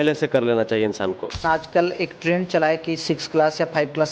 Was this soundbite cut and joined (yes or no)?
yes